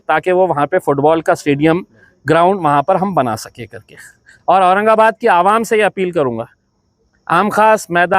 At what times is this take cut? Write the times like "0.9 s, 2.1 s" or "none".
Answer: none